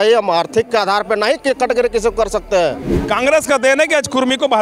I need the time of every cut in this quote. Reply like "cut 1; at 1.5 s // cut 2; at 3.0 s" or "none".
cut 1; at 2.9 s